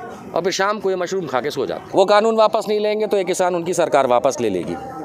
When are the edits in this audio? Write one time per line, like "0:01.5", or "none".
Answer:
0:01.8